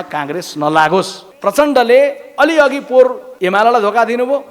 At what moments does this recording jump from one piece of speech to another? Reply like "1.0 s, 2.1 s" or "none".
1.2 s, 3.3 s